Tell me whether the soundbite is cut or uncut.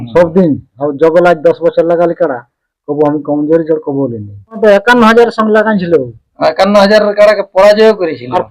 cut